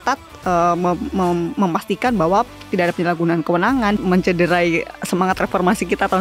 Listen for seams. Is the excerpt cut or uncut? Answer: cut